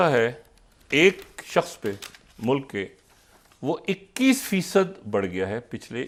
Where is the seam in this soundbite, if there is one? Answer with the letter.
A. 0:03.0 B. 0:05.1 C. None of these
C